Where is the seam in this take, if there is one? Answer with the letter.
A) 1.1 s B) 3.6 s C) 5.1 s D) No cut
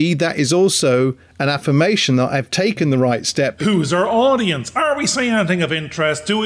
B